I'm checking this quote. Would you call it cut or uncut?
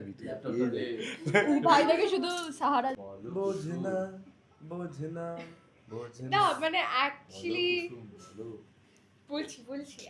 cut